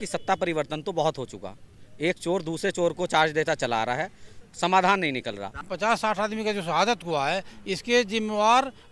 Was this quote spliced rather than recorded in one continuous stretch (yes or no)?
yes